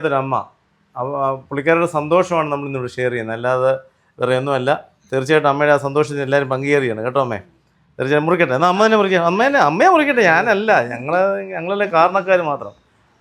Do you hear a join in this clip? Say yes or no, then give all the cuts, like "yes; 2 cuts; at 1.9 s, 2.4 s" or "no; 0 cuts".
no; 0 cuts